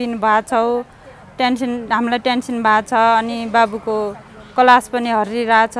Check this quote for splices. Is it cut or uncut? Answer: uncut